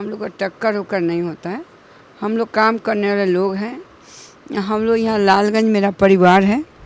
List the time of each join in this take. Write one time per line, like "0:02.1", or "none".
none

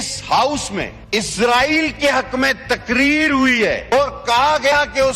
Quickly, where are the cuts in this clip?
0:01.0
0:04.0

